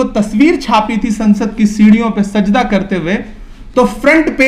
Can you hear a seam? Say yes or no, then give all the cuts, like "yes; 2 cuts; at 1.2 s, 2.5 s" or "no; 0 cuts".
no; 0 cuts